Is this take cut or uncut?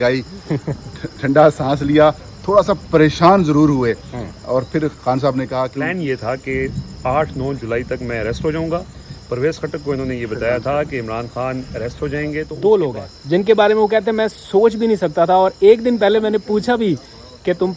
cut